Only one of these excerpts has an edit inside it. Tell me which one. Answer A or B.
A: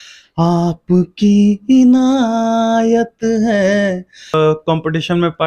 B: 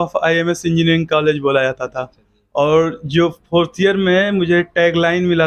A